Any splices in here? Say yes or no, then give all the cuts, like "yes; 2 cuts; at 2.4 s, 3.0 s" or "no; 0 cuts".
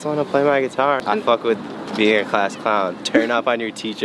yes; 1 cut; at 1.0 s